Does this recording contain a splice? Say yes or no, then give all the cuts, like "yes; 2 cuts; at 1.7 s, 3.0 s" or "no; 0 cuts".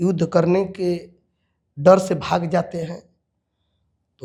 no; 0 cuts